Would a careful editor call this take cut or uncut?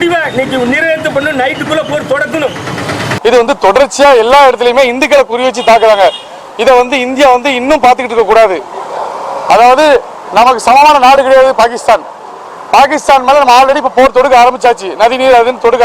cut